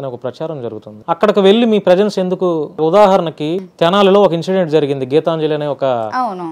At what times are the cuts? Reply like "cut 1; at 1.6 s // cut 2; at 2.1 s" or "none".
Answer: cut 1; at 0.9 s // cut 2; at 2.8 s // cut 3; at 3.7 s